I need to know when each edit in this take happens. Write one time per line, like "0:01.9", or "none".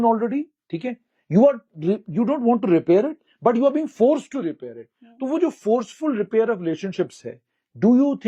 none